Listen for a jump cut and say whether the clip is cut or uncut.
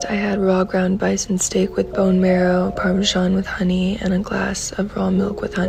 uncut